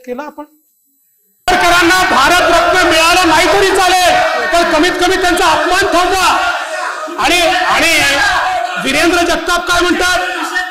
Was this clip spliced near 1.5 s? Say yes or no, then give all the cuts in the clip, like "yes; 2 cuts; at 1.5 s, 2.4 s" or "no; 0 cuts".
yes; 1 cut; at 1.5 s